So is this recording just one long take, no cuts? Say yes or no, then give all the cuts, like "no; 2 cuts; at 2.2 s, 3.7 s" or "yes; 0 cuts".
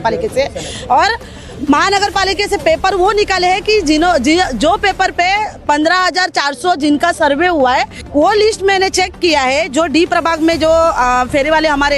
no; 1 cut; at 8.0 s